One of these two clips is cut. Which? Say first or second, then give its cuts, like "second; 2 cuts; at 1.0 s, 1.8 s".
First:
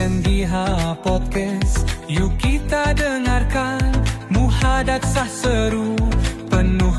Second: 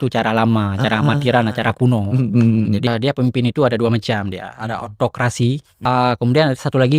second; 2 cuts; at 2.9 s, 5.7 s